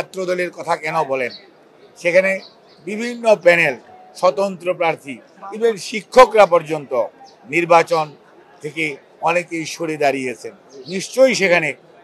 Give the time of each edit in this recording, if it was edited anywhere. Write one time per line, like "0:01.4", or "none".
none